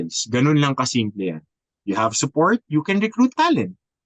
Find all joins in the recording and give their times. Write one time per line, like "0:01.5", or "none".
none

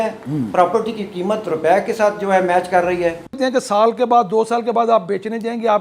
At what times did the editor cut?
0:03.3

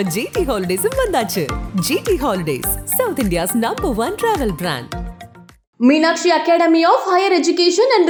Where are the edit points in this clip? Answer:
none

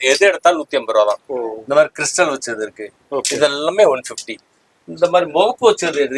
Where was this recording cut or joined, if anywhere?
none

